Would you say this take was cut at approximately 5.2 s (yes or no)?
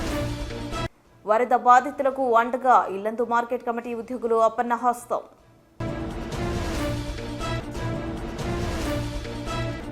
no